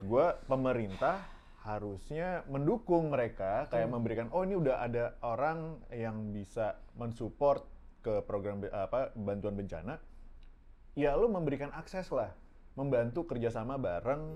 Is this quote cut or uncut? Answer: uncut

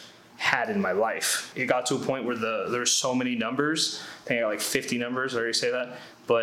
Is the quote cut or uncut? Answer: cut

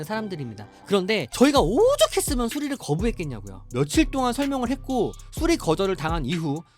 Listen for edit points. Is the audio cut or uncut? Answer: cut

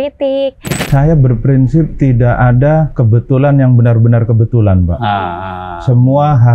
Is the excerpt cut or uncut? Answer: cut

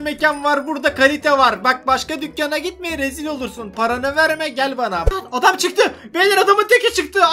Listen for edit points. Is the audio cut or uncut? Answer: cut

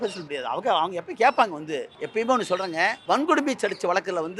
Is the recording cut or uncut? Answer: cut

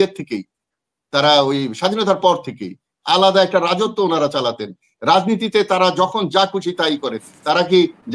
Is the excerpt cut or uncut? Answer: uncut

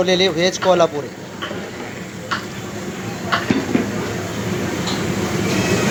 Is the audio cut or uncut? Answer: uncut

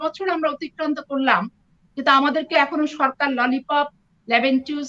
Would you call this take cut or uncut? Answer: uncut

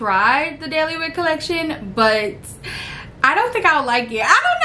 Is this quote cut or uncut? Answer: uncut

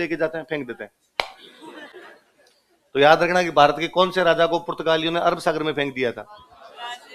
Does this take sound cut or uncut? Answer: uncut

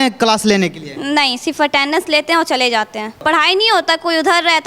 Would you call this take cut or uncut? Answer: cut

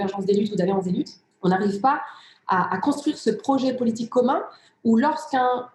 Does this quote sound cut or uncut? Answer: cut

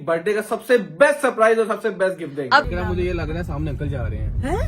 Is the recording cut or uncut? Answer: cut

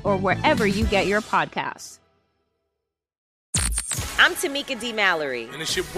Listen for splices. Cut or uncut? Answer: cut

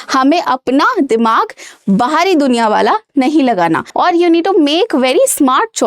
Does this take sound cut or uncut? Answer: cut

